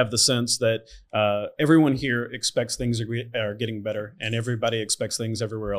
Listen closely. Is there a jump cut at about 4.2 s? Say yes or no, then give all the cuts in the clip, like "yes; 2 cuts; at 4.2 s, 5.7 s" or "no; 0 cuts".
no; 0 cuts